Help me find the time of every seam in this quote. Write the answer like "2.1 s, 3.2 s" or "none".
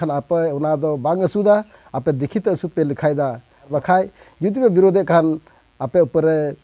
3.6 s